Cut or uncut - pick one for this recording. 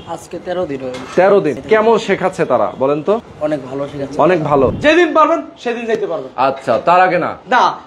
cut